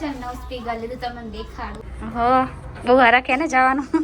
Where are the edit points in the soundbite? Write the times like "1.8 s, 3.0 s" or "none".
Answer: 1.9 s